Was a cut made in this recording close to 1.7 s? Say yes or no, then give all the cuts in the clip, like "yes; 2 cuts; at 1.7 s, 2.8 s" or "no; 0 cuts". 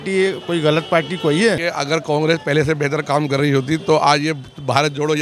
yes; 1 cut; at 1.7 s